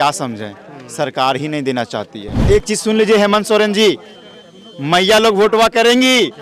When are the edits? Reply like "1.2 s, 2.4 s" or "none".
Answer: 2.4 s